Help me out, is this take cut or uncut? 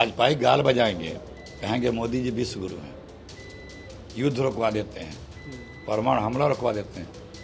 uncut